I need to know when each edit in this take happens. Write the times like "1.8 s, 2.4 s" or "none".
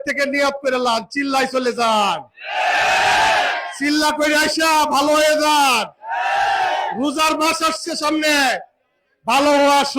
none